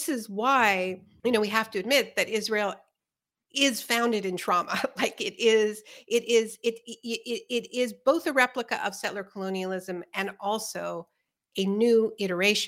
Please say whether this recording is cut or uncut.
cut